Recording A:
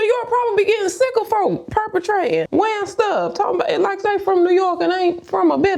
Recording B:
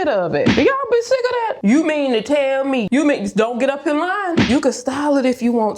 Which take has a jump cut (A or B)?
B